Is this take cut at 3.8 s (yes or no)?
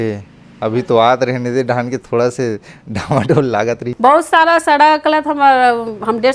yes